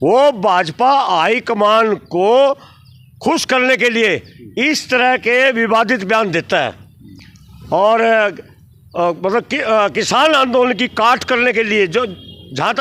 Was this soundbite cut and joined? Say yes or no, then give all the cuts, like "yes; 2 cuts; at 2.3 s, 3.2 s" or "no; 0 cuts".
no; 0 cuts